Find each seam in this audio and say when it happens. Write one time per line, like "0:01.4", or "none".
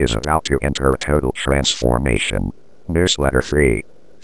0:02.8